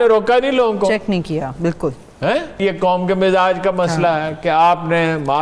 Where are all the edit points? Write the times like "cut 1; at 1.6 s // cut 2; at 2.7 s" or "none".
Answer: cut 1; at 2.6 s